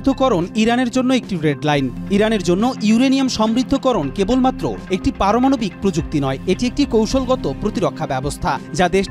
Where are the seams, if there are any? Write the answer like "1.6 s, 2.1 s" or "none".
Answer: 2.0 s